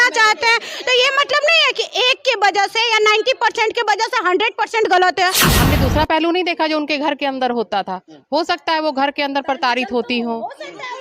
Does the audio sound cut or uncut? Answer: cut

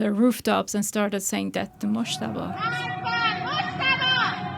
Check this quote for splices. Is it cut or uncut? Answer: cut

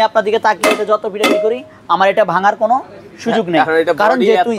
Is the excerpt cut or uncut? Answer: uncut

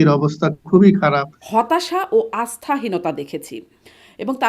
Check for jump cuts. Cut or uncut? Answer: cut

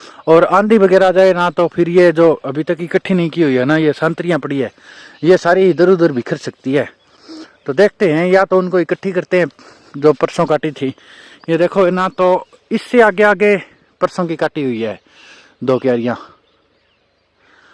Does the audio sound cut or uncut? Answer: uncut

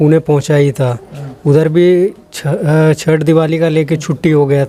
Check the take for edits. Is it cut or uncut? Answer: uncut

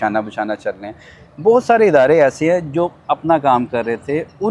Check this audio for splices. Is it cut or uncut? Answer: uncut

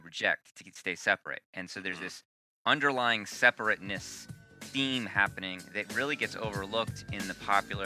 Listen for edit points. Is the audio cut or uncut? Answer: uncut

